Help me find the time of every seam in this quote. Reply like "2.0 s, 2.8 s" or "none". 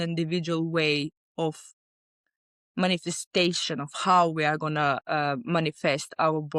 none